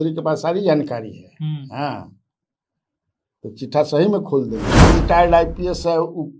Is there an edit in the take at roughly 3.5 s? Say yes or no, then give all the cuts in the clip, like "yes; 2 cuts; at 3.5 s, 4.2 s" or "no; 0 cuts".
no; 1 cut; at 4.7 s